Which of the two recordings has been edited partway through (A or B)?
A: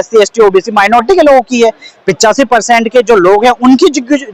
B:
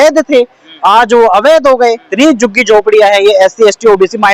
B